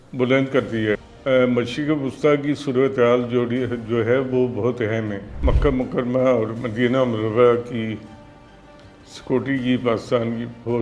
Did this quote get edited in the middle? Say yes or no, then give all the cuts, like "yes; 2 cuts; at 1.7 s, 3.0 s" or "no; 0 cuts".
yes; 2 cuts; at 1.1 s, 5.3 s